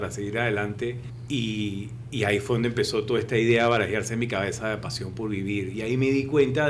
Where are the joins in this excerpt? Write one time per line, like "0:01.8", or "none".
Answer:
0:01.1